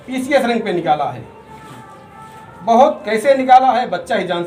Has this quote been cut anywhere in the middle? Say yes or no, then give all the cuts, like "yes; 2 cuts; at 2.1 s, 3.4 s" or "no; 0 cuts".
no; 0 cuts